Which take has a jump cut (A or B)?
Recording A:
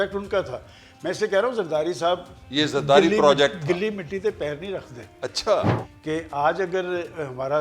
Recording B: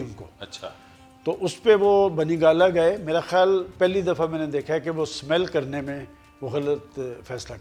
A